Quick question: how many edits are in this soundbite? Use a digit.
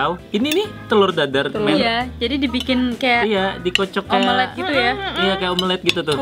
0